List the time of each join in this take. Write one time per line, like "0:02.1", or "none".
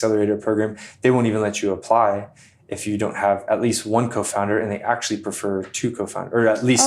none